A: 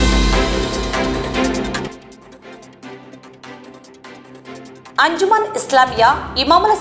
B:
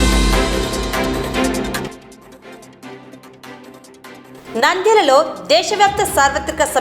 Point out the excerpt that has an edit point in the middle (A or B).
B